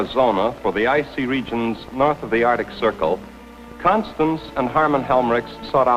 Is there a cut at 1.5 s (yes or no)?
yes